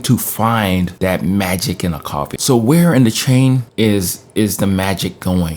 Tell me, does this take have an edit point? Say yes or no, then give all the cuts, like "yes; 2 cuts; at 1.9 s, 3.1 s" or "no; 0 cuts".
yes; 1 cut; at 2.3 s